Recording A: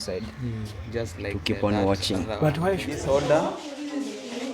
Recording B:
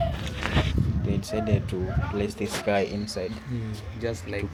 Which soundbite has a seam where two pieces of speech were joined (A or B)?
A